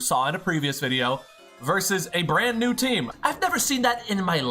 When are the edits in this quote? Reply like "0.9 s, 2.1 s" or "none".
3.1 s